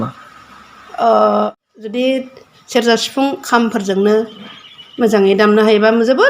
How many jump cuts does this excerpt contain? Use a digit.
1